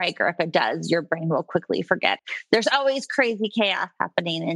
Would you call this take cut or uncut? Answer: cut